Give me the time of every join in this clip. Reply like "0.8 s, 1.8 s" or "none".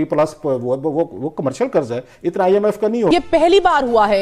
3.1 s